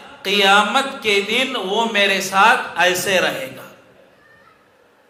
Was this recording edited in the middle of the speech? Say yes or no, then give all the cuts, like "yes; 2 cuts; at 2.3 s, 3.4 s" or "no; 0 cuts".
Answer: no; 0 cuts